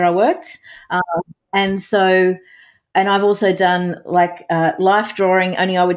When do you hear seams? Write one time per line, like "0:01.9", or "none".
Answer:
none

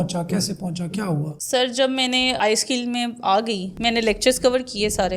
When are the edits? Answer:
none

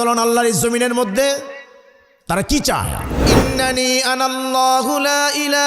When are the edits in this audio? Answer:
0:03.3

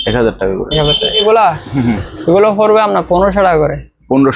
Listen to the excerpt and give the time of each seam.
0:01.2

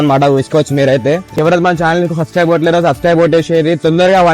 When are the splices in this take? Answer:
0:01.3

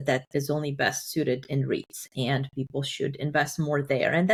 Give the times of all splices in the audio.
none

